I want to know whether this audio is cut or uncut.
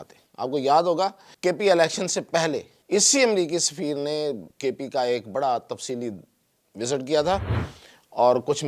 cut